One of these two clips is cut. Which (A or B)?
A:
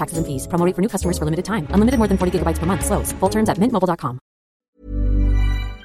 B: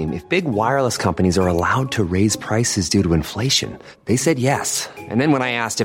A